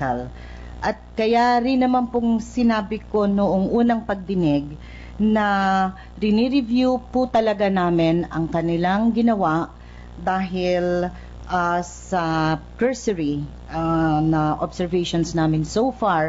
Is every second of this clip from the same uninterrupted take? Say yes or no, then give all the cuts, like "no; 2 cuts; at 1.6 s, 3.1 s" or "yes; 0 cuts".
no; 1 cut; at 2.0 s